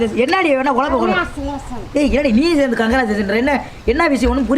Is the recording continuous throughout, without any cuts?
yes; 0 cuts

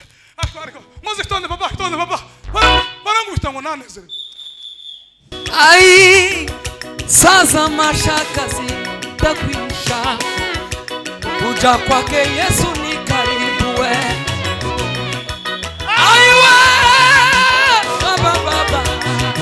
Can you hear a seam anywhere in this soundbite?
yes; 1 cut; at 5.3 s

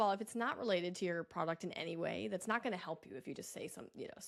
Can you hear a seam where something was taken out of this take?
no; 0 cuts

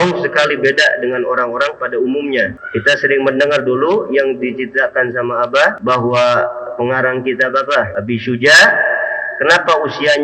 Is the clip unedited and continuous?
no; 1 cut; at 2.5 s

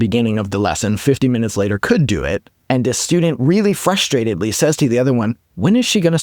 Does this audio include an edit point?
yes; 1 cut; at 2.5 s

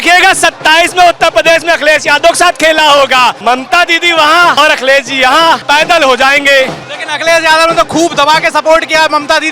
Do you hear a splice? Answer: yes; 3 cuts; at 3.4 s, 4.6 s, 5.6 s

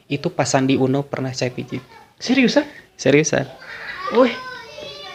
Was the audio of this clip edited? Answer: no; 0 cuts

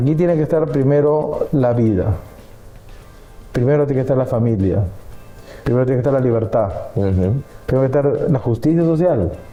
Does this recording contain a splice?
no; 0 cuts

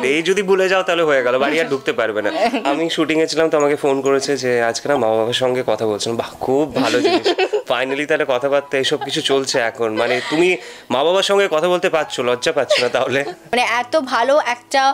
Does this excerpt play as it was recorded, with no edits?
no; 2 cuts; at 2.6 s, 13.5 s

